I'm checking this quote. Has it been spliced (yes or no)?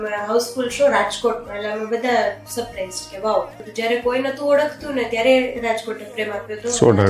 yes